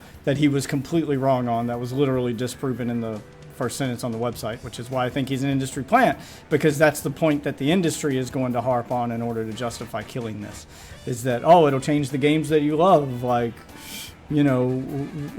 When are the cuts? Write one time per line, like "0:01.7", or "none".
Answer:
none

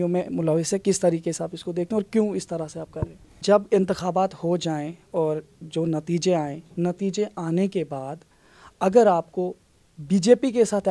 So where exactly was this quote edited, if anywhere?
0:03.3

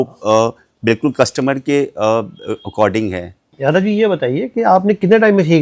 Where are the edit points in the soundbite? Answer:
0:03.5

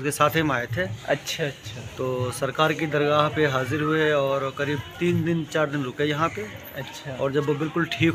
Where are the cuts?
none

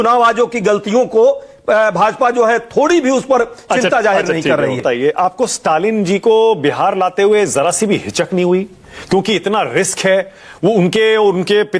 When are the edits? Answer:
none

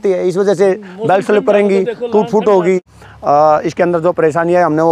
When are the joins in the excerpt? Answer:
0:02.9

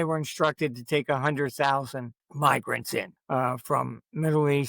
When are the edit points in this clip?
0:02.2
0:03.2

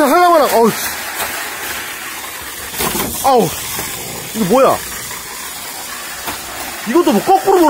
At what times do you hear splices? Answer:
none

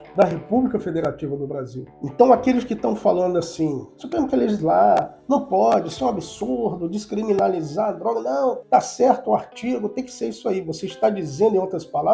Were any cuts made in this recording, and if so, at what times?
0:08.6

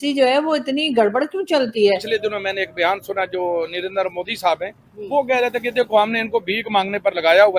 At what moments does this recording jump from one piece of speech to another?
0:02.1

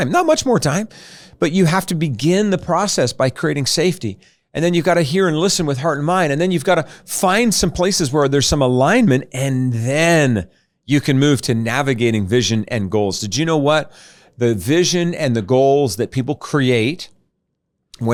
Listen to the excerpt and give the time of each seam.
none

